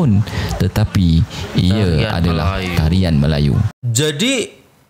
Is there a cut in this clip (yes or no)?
yes